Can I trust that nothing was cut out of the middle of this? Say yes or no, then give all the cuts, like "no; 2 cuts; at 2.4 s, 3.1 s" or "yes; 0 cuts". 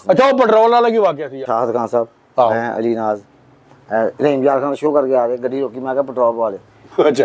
yes; 0 cuts